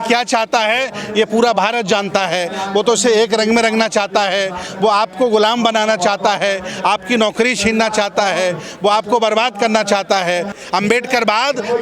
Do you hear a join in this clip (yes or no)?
yes